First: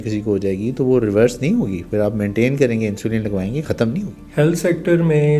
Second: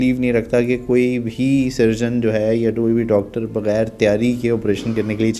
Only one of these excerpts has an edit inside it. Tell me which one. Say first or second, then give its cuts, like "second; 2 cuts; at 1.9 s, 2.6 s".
first; 1 cut; at 4.2 s